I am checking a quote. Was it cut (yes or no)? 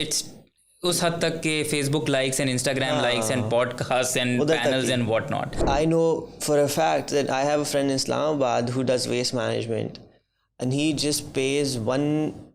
yes